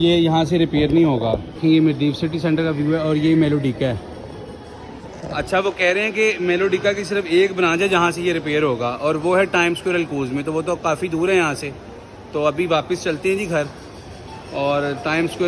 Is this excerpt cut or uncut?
uncut